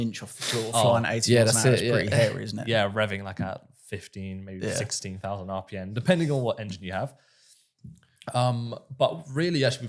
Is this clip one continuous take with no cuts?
yes; 0 cuts

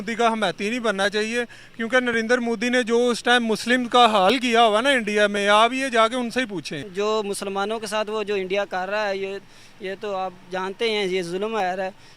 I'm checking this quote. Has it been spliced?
yes; 1 cut; at 6.8 s

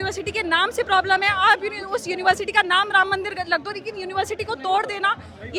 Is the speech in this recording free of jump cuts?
yes; 0 cuts

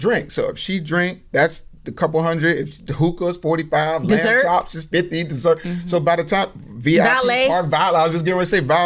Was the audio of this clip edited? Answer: no; 0 cuts

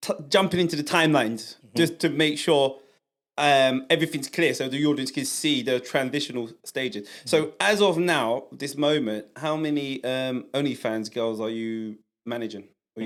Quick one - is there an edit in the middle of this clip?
no; 0 cuts

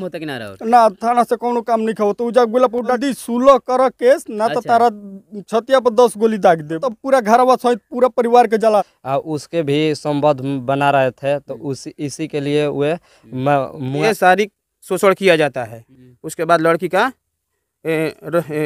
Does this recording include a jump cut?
yes; 4 cuts; at 3.0 s, 6.9 s, 8.9 s, 14.0 s

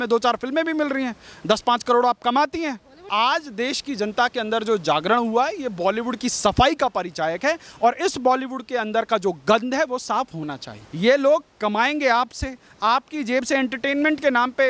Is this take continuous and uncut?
no; 2 cuts; at 3.1 s, 10.8 s

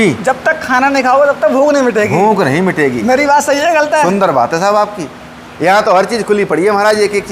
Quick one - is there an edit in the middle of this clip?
no; 0 cuts

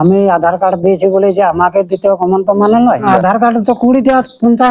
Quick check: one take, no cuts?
no; 1 cut; at 3.1 s

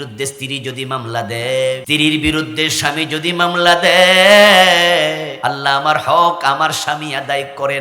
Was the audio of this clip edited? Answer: yes; 2 cuts; at 1.8 s, 5.3 s

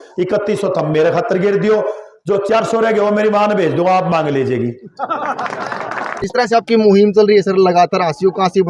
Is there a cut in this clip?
yes; 1 cut; at 6.1 s

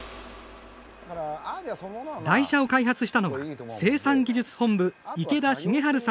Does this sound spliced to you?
yes; 1 cut; at 1.0 s

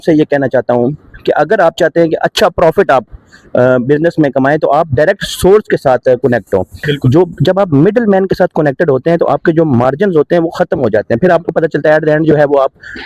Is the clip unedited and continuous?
yes; 0 cuts

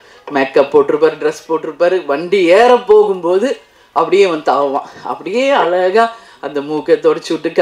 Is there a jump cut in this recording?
no; 0 cuts

